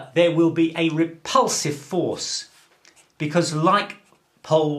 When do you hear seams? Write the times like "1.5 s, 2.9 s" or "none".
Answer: none